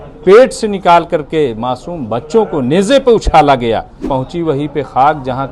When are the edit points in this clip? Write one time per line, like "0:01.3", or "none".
0:04.0